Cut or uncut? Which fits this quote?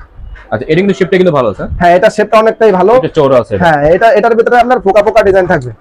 uncut